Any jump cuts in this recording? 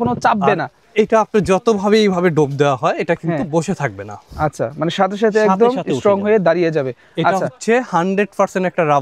no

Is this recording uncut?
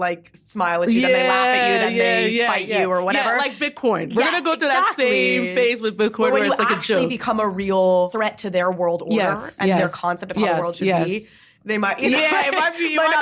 no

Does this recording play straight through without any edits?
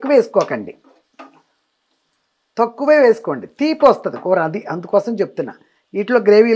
yes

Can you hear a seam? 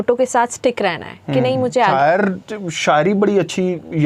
yes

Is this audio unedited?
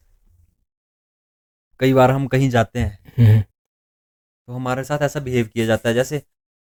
yes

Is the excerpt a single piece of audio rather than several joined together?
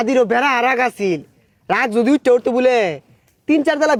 yes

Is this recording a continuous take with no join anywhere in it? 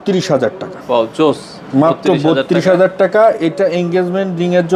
yes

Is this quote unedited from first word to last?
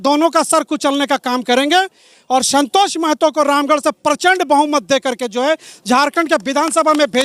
yes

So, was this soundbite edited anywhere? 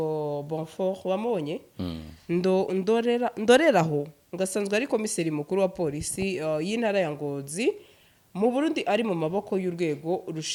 no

